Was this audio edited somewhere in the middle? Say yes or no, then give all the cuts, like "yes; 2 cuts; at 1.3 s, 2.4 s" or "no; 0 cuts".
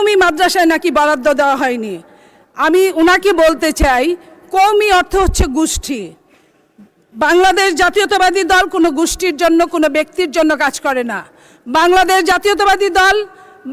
no; 0 cuts